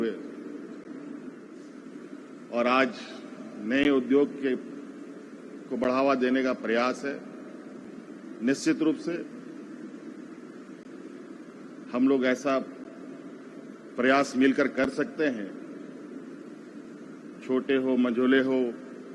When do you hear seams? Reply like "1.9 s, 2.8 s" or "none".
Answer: 1.6 s